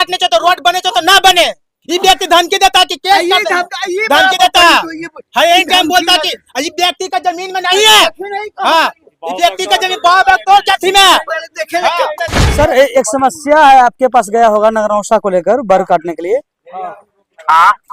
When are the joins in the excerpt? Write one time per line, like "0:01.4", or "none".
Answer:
0:12.4